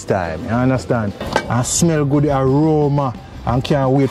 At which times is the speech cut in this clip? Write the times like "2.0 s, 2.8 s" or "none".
1.2 s